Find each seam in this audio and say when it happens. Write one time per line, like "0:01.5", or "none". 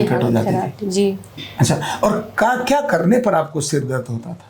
none